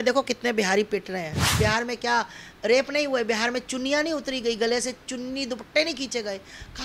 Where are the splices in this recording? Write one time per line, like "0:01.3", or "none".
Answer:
0:01.5